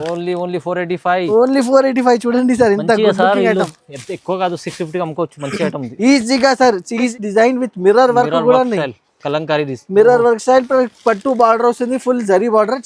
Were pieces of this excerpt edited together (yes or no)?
yes